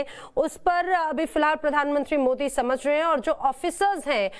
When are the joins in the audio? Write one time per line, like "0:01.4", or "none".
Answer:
0:03.2